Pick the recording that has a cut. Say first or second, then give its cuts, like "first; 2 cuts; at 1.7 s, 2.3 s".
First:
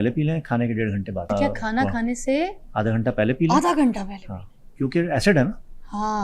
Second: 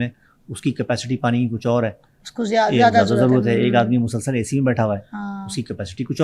first; 1 cut; at 1.3 s